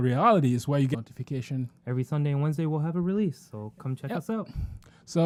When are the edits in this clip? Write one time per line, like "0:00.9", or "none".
none